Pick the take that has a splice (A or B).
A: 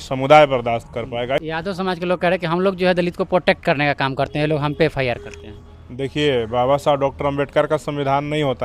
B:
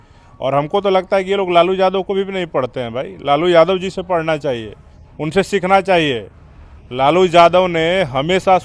A